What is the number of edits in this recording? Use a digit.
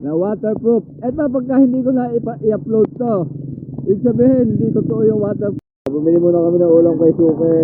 1